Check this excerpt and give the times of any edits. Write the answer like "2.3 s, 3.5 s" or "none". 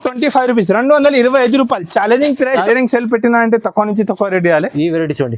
2.6 s